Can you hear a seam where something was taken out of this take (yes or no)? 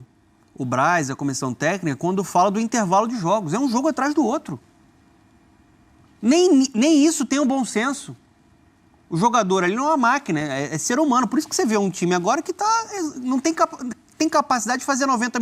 no